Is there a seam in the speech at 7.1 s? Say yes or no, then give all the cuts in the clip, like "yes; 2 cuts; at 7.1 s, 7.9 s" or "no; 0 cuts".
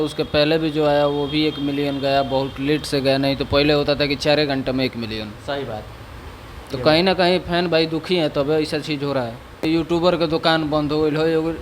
no; 1 cut; at 9.6 s